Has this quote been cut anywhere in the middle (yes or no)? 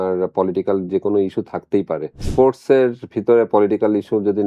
yes